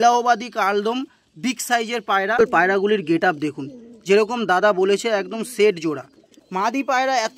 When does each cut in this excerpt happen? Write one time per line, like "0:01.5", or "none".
0:02.4
0:06.4